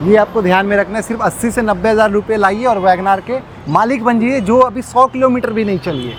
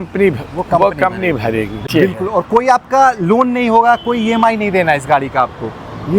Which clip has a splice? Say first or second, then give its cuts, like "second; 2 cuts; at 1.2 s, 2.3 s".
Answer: second; 1 cut; at 1.8 s